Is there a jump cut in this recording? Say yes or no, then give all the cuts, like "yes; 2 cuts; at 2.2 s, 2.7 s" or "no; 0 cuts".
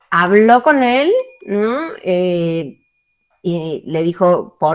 no; 0 cuts